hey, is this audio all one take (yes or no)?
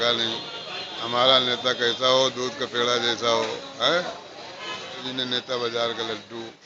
no